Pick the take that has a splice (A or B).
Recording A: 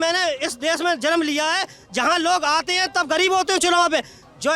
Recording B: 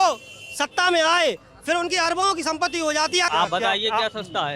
B